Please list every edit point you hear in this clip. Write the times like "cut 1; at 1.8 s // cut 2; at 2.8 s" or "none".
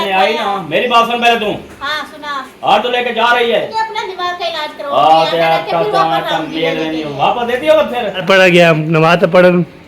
cut 1; at 3.7 s // cut 2; at 8.2 s